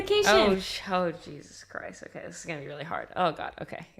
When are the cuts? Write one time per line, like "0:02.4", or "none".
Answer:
none